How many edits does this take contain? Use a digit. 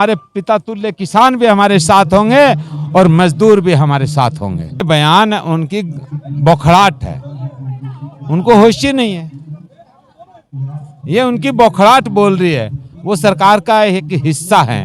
1